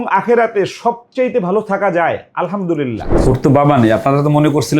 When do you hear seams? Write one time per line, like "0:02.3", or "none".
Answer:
0:03.2

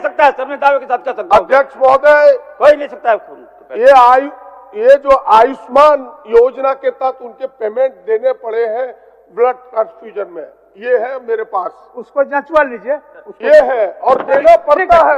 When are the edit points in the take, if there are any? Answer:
none

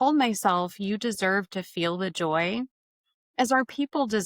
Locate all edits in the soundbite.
none

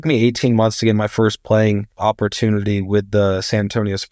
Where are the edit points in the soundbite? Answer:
0:01.9

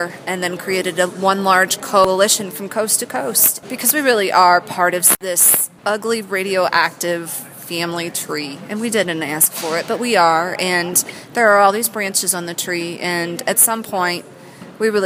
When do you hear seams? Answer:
0:02.0
0:03.5
0:05.2

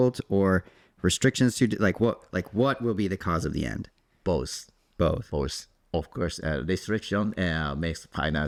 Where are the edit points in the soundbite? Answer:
none

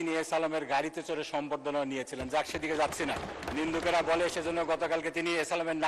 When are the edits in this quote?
0:03.5

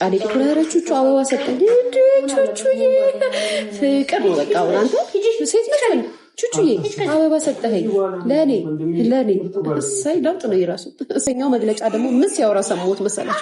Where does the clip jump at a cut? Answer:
0:11.2

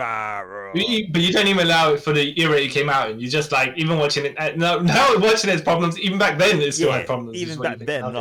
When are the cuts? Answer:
none

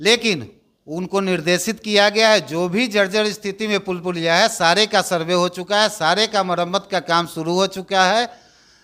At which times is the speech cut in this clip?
none

